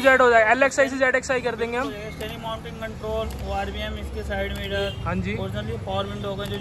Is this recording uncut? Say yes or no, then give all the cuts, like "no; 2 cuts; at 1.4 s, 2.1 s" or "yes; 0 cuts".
yes; 0 cuts